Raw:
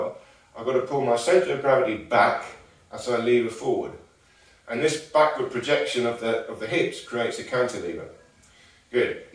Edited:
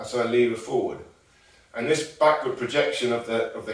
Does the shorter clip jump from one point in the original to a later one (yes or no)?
no